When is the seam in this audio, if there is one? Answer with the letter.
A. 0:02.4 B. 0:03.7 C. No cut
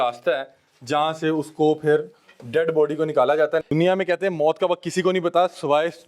B